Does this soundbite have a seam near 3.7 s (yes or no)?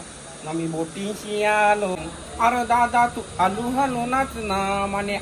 no